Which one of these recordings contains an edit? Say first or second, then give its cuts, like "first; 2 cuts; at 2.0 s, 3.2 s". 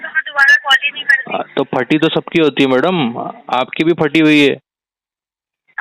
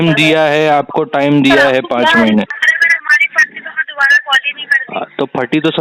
second; 1 cut; at 2.5 s